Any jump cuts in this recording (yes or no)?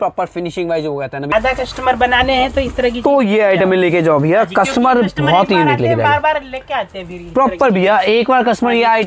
yes